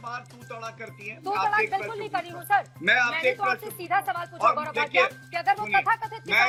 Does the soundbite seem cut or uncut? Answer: uncut